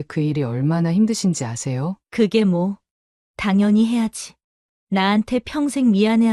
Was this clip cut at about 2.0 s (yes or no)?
yes